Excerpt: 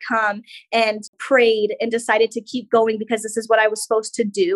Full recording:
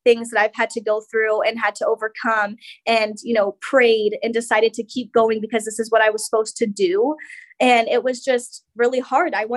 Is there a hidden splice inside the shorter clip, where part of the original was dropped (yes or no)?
yes